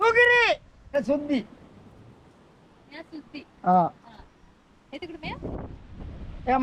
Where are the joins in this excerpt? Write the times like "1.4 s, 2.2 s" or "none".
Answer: 0.9 s